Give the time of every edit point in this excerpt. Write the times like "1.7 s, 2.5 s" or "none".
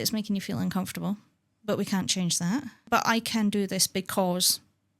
2.8 s